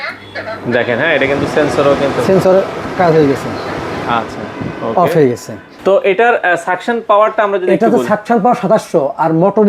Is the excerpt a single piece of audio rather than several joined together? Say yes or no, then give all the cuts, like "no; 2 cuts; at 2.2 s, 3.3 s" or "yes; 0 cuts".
yes; 0 cuts